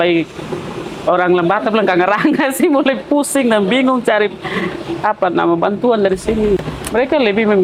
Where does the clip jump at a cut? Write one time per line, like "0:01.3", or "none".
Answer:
0:06.6